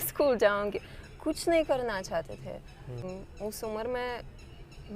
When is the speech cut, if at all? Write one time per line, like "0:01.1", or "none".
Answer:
0:03.2